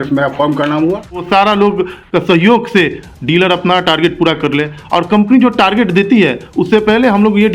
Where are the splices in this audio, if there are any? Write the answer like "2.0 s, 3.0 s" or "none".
1.2 s